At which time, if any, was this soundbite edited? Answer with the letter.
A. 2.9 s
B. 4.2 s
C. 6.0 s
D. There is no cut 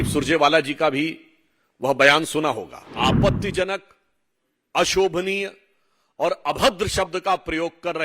A